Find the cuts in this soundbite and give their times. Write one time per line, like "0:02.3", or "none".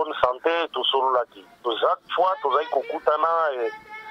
none